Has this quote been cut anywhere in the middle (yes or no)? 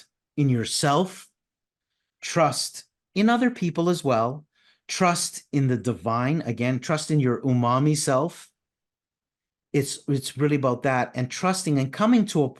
no